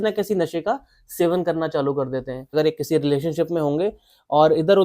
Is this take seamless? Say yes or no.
no